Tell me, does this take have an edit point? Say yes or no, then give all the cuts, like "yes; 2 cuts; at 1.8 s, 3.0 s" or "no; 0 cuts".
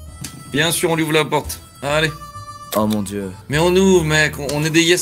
yes; 1 cut; at 3.4 s